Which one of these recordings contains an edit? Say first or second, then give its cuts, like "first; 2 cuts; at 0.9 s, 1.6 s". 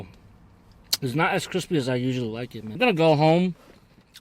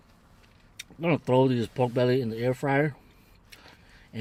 first; 1 cut; at 2.6 s